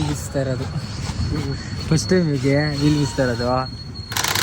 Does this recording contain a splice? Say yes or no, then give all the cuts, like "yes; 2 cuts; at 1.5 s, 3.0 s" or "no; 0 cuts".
no; 0 cuts